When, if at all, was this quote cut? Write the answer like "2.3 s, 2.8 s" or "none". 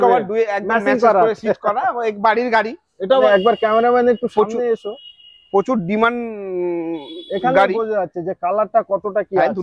3.2 s